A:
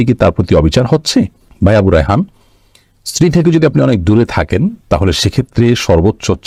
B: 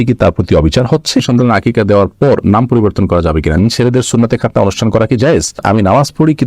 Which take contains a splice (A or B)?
B